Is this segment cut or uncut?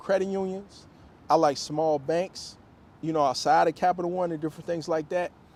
uncut